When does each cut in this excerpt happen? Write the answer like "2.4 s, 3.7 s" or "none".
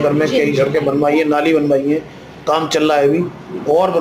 none